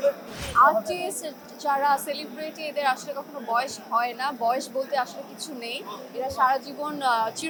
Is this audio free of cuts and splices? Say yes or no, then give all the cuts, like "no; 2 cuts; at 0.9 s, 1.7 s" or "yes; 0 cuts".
yes; 0 cuts